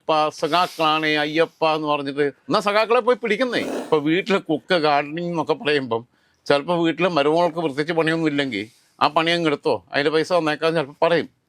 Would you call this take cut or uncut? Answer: cut